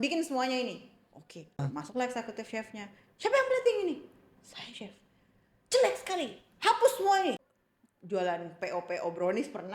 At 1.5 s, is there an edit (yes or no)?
yes